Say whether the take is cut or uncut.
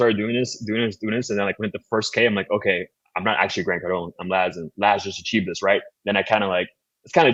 uncut